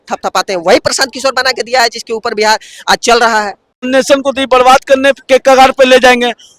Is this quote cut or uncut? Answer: cut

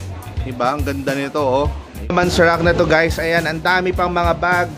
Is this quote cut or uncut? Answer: cut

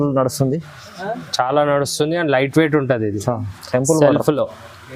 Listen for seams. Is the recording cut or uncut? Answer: uncut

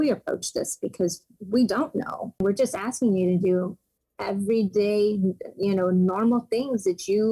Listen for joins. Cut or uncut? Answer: cut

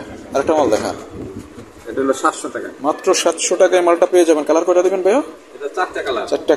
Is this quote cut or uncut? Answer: uncut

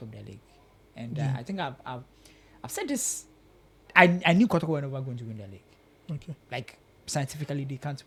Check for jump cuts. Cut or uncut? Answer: uncut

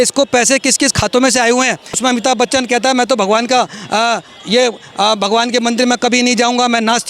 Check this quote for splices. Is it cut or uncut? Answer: cut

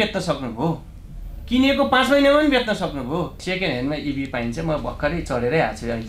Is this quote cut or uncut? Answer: cut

